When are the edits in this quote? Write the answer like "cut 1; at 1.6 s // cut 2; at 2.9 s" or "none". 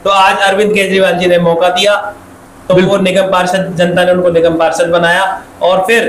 none